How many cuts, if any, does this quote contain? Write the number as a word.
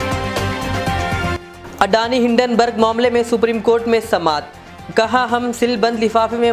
zero